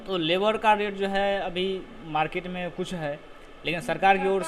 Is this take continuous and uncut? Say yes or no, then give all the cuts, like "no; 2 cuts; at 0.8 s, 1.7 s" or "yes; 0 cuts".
yes; 0 cuts